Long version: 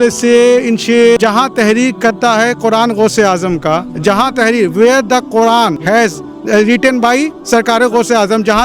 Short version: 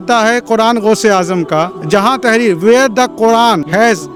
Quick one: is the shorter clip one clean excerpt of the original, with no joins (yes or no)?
yes